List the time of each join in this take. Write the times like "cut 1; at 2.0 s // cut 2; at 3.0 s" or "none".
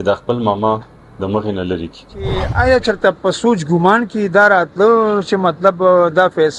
cut 1; at 2.5 s